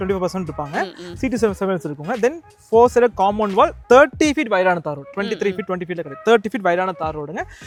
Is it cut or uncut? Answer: uncut